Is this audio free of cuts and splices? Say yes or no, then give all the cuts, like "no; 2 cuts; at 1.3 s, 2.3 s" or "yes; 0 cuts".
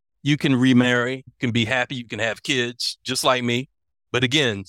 no; 1 cut; at 1.3 s